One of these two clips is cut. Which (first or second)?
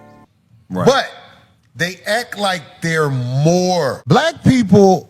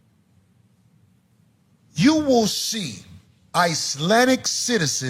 first